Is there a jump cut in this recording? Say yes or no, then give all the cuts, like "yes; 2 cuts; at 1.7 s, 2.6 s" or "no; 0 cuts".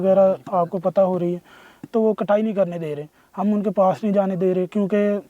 no; 0 cuts